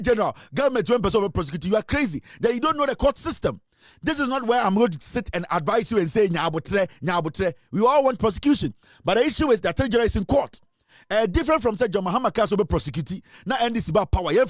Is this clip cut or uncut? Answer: uncut